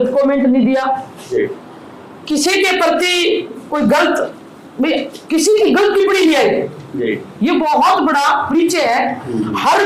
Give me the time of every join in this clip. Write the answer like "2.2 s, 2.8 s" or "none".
none